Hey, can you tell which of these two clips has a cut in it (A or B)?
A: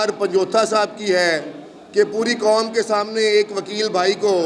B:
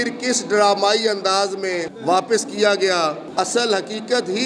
B